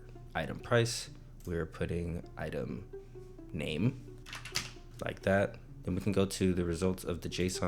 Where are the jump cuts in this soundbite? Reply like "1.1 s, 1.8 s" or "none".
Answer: 4.1 s, 5.7 s